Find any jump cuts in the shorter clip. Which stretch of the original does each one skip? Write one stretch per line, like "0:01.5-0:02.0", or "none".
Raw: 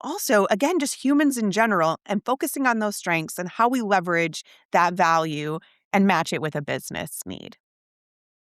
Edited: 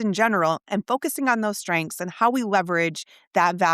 none